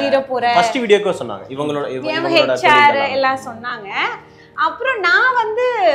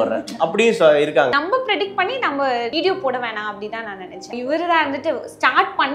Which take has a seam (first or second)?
second